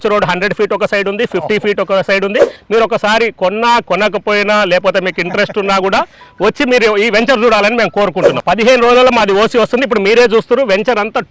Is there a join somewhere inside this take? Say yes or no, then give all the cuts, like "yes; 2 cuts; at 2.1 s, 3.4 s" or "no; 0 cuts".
yes; 2 cuts; at 2.6 s, 8.3 s